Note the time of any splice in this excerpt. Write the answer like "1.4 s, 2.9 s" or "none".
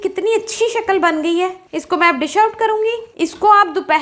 1.7 s, 3.1 s

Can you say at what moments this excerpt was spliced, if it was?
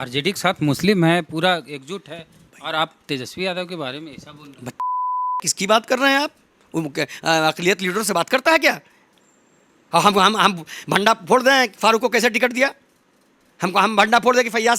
none

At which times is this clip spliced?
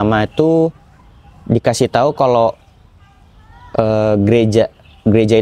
none

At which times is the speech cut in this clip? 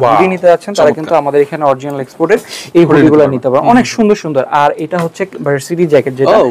none

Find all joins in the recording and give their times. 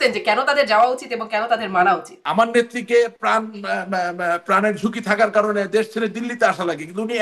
2.2 s

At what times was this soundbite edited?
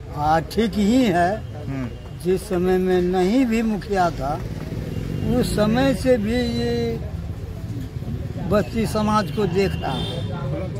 none

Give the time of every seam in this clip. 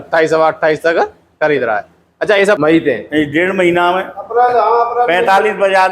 2.6 s

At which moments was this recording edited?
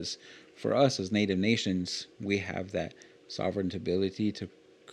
none

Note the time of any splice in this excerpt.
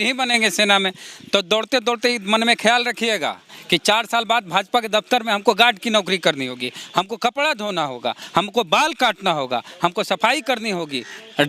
none

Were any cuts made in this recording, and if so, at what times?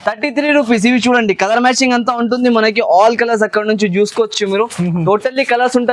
none

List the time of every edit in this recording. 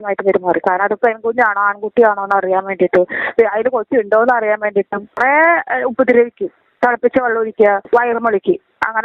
5.1 s

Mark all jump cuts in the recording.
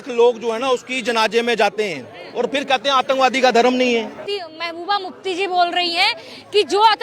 4.2 s

